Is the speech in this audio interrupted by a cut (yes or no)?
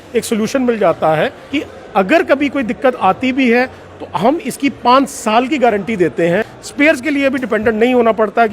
yes